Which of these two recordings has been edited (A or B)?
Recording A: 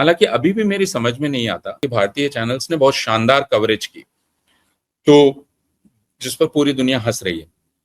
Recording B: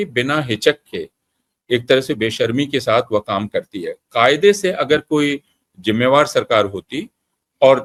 A